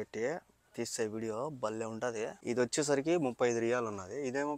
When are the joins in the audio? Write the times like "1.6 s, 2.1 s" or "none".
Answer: 2.4 s